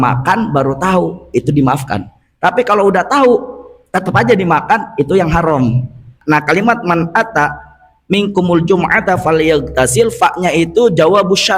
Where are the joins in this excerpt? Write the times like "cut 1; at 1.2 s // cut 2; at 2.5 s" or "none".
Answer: cut 1; at 6.2 s